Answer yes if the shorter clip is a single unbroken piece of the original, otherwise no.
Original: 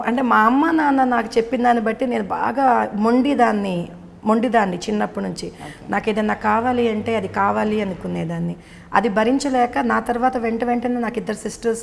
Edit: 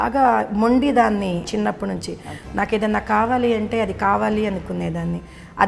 no